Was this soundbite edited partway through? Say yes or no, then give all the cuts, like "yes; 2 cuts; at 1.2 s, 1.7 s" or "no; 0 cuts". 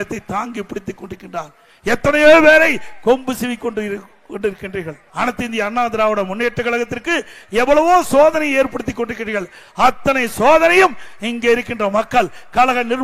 yes; 1 cut; at 5.0 s